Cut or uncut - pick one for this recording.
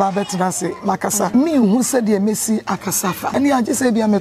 cut